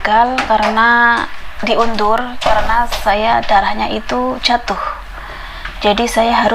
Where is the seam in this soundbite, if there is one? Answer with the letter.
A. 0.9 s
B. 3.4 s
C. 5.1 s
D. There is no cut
D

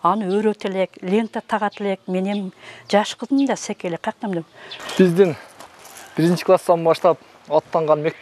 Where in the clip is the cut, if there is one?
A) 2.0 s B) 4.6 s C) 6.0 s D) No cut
B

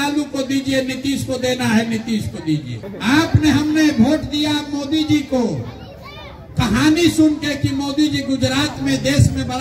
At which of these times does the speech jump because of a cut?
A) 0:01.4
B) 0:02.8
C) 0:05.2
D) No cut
B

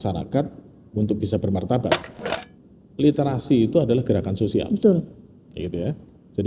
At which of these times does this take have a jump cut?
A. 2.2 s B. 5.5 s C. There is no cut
A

